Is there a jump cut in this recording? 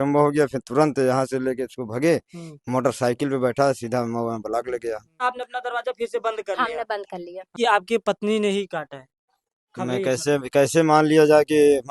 yes; 2 cuts; at 5.2 s, 7.5 s

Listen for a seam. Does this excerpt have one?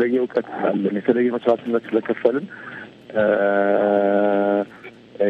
no; 0 cuts

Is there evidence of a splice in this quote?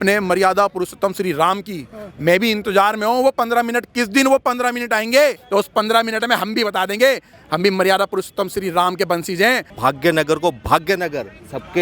yes; 3 cuts; at 5.4 s, 7.3 s, 9.6 s

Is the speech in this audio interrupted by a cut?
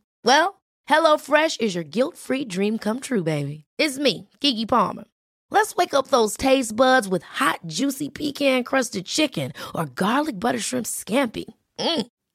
no; 0 cuts

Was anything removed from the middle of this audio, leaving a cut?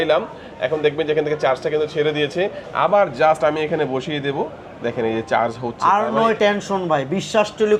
no; 0 cuts

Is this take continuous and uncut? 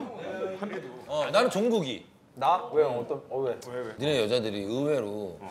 no; 2 cuts; at 1.0 s, 3.9 s

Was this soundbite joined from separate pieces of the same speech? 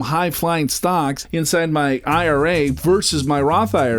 yes; 1 cut; at 1.2 s

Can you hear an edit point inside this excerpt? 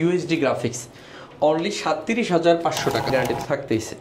yes; 1 cut; at 3.1 s

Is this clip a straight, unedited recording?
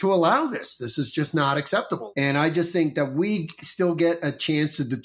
no; 1 cut; at 2.1 s

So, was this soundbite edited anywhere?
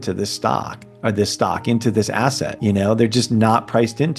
yes; 1 cut; at 2.5 s

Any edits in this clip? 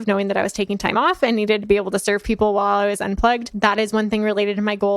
yes; 1 cut; at 3.5 s

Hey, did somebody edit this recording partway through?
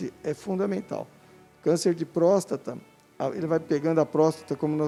no; 0 cuts

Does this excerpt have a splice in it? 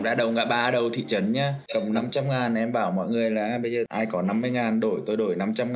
yes; 2 cuts; at 1.6 s, 3.9 s

